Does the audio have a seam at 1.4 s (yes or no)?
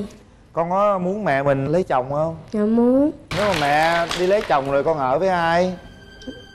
no